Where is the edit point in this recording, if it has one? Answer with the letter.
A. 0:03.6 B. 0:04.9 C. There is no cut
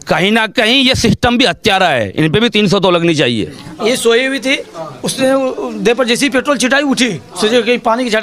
A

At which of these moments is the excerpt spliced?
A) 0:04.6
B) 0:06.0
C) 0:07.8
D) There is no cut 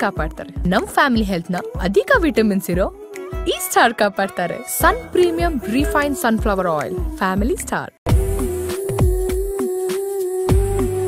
C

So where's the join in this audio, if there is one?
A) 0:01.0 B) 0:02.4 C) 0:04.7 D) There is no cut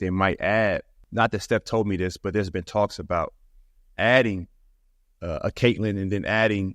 A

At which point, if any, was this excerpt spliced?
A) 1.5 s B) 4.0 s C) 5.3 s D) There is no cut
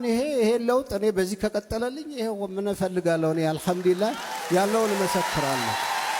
D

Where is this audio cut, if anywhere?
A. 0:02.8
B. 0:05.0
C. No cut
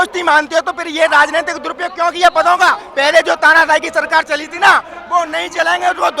A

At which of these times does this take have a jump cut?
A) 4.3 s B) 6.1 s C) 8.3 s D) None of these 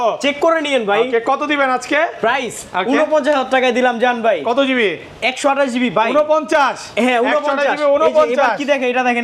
D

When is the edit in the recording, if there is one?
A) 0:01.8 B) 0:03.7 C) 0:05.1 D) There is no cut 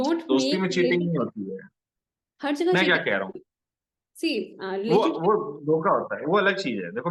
D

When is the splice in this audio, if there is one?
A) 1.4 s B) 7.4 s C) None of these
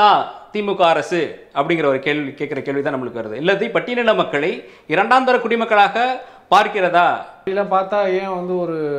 B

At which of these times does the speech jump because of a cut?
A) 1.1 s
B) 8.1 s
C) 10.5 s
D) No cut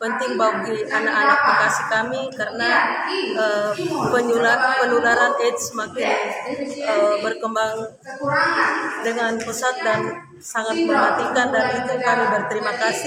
D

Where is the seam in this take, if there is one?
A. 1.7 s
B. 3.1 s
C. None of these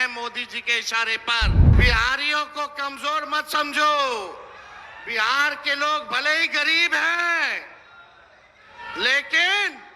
A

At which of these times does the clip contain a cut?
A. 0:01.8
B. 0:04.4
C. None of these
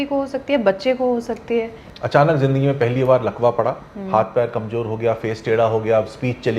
A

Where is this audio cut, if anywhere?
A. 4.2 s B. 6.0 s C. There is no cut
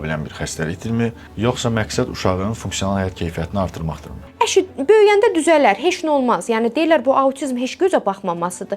A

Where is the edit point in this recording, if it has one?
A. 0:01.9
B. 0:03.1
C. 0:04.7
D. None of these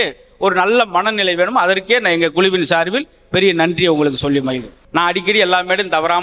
C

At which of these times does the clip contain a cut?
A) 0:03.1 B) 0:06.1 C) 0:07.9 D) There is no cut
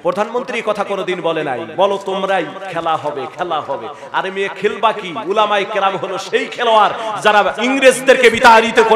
D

